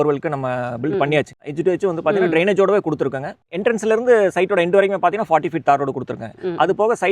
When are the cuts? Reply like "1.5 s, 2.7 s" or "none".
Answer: 1.5 s, 3.5 s